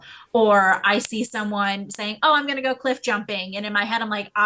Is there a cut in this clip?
no; 0 cuts

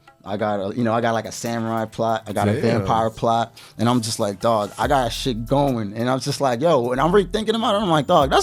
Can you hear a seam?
no; 0 cuts

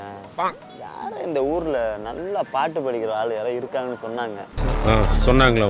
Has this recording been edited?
yes; 1 cut; at 4.5 s

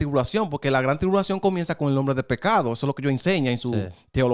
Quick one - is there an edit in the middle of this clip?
no; 0 cuts

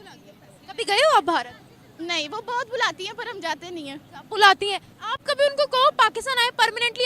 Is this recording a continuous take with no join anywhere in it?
yes; 0 cuts

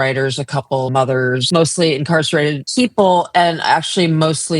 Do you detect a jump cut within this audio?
yes; 2 cuts; at 1.1 s, 2.6 s

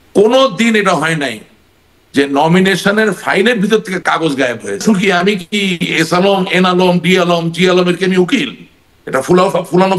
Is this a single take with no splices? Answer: no; 1 cut; at 4.8 s

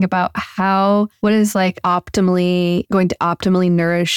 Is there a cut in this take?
yes; 2 cuts; at 1.6 s, 2.9 s

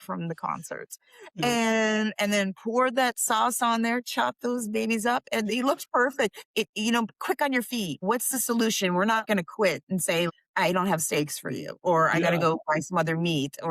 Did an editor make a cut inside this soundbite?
yes; 4 cuts; at 6.4 s, 8.0 s, 9.2 s, 10.3 s

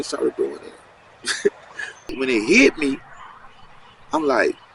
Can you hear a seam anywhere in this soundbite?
yes; 1 cut; at 2.0 s

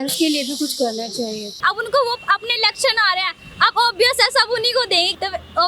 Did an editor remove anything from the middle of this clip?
yes; 1 cut; at 1.5 s

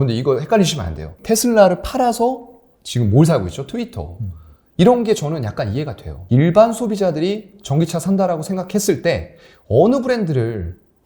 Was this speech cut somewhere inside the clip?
yes; 2 cuts; at 1.1 s, 6.1 s

